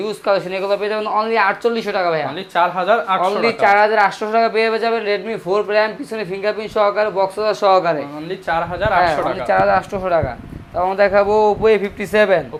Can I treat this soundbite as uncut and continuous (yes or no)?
yes